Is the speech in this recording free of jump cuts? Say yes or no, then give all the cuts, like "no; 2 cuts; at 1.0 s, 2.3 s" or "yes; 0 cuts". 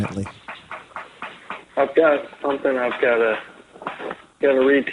no; 1 cut; at 3.4 s